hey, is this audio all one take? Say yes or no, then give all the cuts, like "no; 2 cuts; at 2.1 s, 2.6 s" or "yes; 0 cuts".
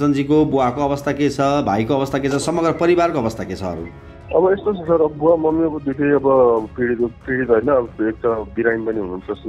yes; 0 cuts